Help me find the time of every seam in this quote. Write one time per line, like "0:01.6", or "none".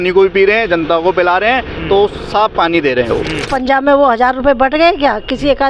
0:03.5